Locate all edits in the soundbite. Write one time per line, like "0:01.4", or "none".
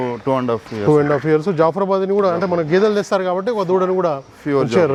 none